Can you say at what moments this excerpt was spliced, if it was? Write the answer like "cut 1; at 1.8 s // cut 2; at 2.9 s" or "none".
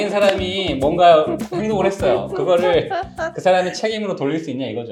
none